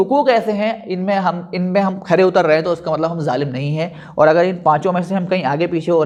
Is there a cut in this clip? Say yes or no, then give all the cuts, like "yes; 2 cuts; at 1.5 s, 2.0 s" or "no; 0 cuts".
no; 0 cuts